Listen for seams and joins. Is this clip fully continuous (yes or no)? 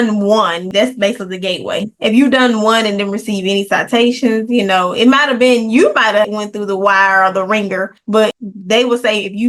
no